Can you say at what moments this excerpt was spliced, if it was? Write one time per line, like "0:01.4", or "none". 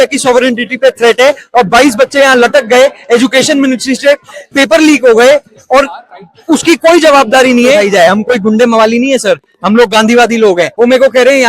0:07.9
0:10.7